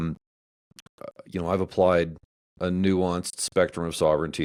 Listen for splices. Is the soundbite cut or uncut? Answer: uncut